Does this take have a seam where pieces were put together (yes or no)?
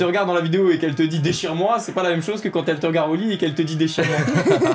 no